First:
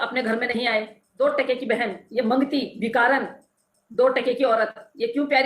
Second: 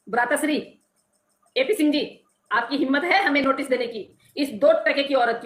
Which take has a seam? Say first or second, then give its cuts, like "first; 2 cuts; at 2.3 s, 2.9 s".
first; 1 cut; at 1.0 s